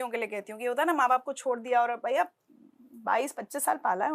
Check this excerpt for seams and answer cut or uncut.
uncut